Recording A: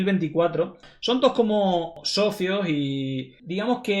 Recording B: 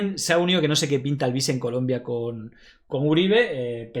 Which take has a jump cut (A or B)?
A